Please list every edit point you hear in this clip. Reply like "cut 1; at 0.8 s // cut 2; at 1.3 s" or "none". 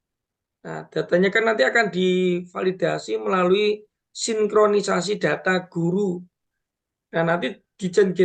cut 1; at 6.1 s